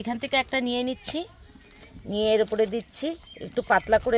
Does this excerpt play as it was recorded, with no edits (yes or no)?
yes